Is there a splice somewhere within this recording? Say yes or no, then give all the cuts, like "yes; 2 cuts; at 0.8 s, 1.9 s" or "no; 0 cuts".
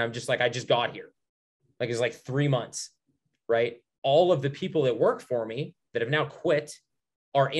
no; 0 cuts